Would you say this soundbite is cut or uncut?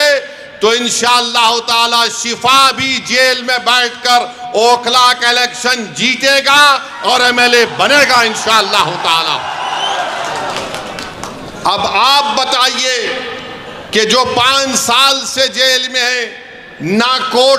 uncut